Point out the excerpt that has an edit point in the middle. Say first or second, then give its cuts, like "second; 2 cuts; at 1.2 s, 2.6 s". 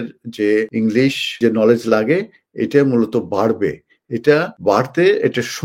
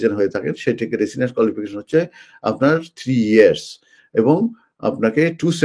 first; 2 cuts; at 1.1 s, 4.5 s